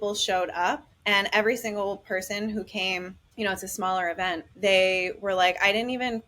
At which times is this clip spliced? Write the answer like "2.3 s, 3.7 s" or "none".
0.9 s, 3.2 s, 4.5 s